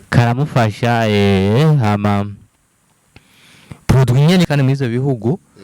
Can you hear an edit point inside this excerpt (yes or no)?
yes